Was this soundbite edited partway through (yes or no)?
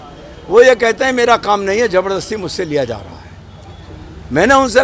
no